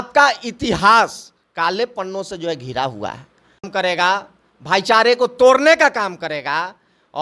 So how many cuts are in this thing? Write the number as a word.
one